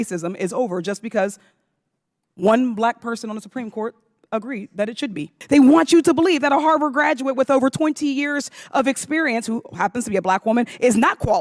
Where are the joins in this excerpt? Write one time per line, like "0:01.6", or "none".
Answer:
0:05.3

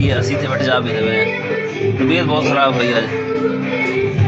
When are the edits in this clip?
none

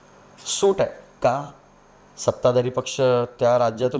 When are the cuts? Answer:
none

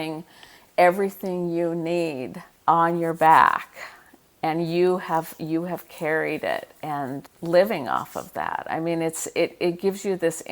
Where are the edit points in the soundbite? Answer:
0:02.1
0:07.3

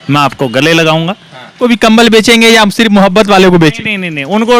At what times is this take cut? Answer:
0:01.6

